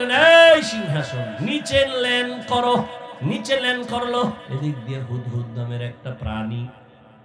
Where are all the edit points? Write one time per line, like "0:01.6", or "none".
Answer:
0:03.1
0:04.4